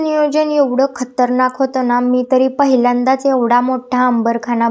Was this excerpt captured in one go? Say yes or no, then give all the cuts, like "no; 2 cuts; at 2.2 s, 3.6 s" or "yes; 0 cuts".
yes; 0 cuts